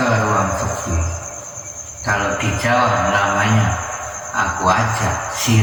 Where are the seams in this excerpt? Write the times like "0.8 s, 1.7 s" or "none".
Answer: none